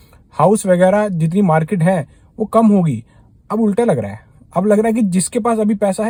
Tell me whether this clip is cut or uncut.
uncut